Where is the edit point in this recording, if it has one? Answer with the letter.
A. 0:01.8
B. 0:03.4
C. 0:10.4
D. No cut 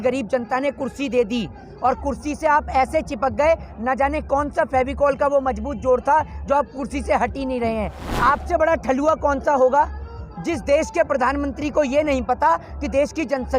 D